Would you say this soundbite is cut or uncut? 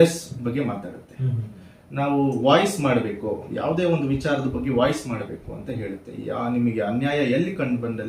uncut